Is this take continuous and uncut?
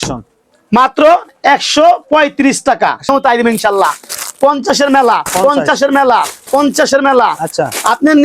no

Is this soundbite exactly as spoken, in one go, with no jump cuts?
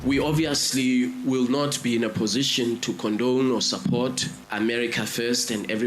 yes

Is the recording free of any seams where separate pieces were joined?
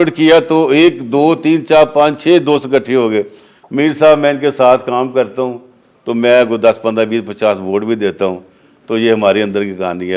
yes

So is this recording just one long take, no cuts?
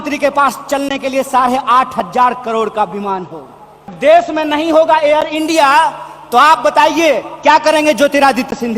no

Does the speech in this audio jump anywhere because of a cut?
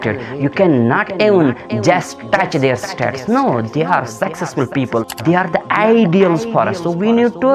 yes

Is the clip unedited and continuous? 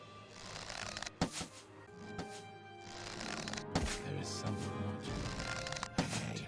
no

